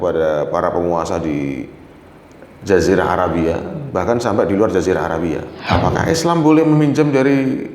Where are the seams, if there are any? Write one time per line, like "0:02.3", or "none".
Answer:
0:05.5